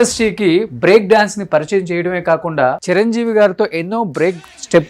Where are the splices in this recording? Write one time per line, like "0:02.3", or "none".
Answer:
0:02.8

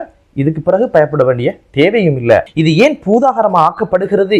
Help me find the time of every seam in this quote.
0:02.5

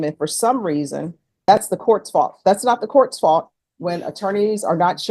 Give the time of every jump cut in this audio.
0:01.5

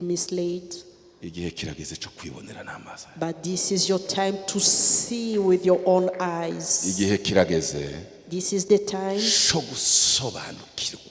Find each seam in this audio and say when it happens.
none

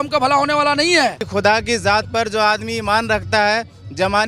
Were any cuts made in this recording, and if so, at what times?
0:01.2

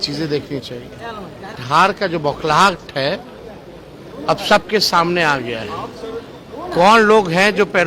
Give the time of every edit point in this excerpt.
0:01.6

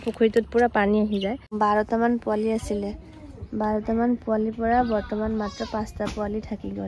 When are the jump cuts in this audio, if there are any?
0:01.4

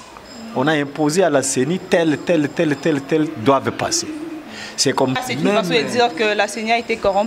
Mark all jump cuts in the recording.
0:05.2

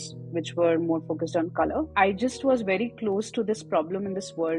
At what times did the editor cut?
0:01.9

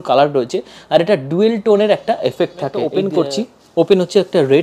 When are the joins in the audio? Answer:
0:02.9

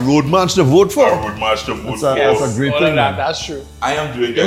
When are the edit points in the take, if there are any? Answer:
none

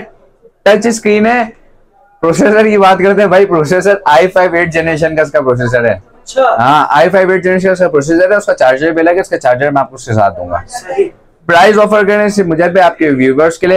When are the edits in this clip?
none

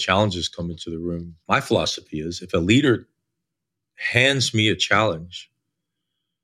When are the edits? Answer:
0:01.3

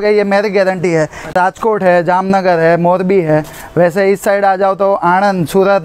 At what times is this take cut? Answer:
0:01.3

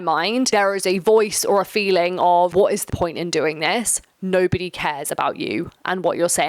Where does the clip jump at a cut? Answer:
0:02.9

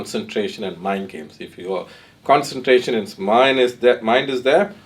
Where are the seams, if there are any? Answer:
none

